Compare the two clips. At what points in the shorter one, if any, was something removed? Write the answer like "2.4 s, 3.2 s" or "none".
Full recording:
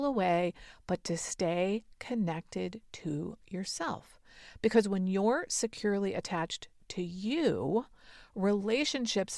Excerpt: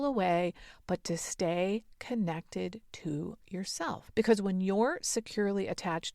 4.0 s